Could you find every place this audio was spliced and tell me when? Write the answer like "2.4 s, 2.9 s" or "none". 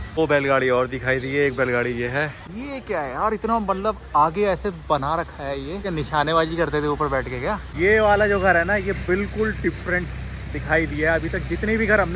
2.4 s, 5.8 s, 7.7 s